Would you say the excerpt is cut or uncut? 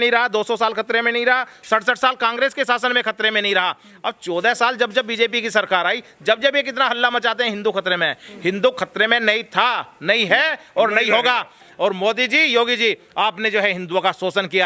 uncut